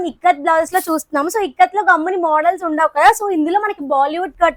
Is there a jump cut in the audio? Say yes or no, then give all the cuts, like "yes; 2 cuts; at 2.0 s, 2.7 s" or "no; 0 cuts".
no; 0 cuts